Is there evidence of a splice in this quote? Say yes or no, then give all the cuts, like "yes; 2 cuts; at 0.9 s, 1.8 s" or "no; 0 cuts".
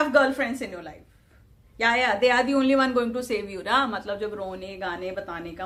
no; 0 cuts